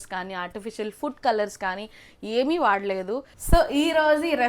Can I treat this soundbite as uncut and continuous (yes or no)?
no